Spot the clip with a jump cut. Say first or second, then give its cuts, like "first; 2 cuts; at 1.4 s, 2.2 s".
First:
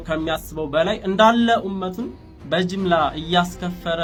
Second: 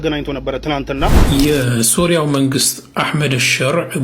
second; 1 cut; at 1.2 s